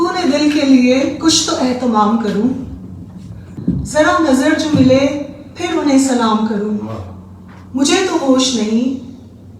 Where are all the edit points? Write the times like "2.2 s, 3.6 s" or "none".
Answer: 3.5 s